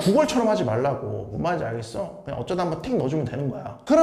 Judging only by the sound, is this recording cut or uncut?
uncut